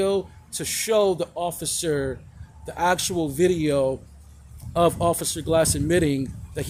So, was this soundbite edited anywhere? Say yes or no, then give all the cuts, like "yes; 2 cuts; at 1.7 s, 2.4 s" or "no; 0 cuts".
no; 0 cuts